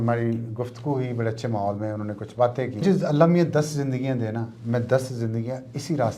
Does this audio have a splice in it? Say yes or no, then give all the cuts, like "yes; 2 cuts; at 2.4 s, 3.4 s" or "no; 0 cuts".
yes; 1 cut; at 2.8 s